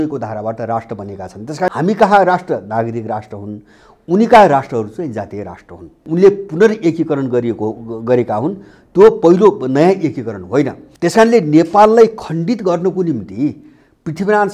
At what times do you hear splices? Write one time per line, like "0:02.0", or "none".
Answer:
0:01.7
0:05.9
0:10.8